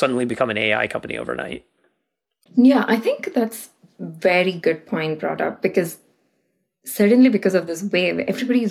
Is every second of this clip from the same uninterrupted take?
yes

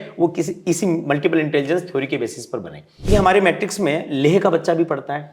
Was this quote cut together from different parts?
yes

